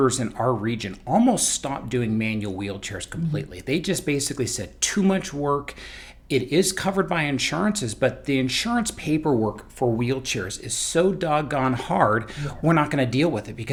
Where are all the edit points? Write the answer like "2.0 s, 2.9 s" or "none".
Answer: none